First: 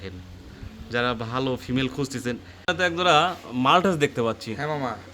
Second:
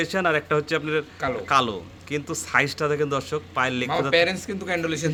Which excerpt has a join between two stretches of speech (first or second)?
first